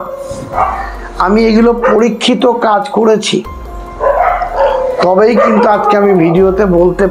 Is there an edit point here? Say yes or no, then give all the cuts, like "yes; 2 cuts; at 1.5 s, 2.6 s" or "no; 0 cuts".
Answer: no; 0 cuts